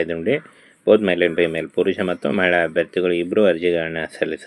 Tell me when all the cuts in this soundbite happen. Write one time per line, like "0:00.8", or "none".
none